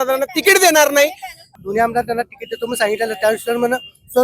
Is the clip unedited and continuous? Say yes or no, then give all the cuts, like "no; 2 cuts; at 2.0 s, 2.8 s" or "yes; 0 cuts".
no; 1 cut; at 1.5 s